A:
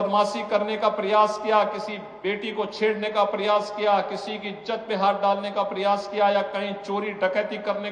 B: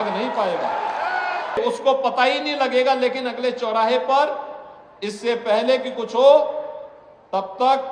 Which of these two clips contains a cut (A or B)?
B